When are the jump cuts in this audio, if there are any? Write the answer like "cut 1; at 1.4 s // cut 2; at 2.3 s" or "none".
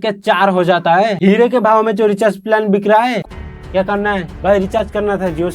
cut 1; at 1.2 s // cut 2; at 3.2 s